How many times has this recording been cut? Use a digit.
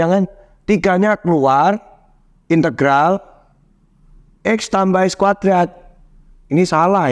0